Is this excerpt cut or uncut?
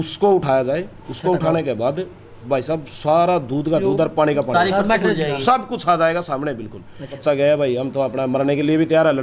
cut